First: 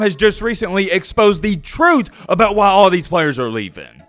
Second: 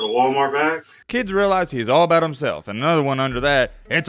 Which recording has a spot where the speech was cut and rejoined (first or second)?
second